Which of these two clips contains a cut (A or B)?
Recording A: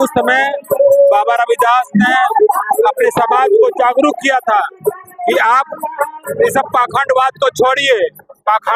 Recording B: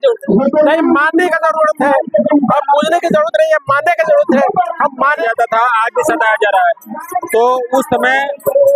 B